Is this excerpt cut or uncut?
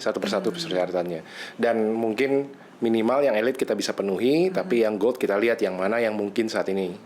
uncut